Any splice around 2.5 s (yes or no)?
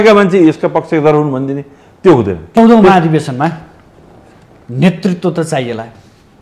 yes